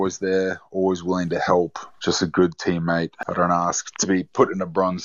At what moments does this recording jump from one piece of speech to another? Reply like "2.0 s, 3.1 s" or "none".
1.8 s, 3.2 s

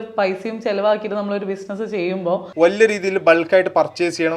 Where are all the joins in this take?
2.5 s

